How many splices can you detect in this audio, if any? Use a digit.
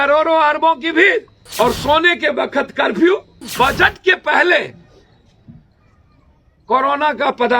2